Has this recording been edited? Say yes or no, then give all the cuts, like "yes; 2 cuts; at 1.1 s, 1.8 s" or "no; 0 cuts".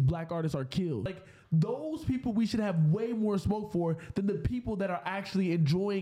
yes; 1 cut; at 1.3 s